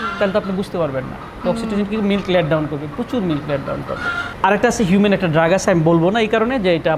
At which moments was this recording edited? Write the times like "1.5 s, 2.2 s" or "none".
4.2 s